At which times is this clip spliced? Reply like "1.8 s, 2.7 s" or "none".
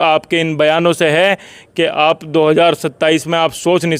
none